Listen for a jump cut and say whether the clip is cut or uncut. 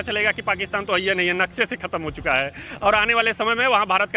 uncut